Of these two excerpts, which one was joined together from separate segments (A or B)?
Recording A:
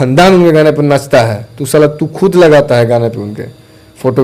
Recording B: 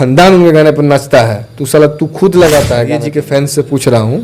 B